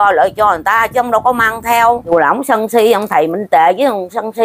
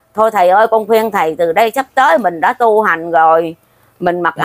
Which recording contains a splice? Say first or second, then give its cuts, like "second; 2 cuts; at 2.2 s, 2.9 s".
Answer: first; 1 cut; at 2.1 s